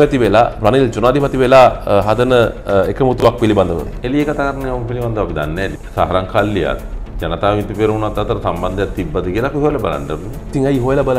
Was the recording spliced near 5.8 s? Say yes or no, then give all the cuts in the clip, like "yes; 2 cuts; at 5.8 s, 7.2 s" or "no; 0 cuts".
yes; 2 cuts; at 3.9 s, 5.8 s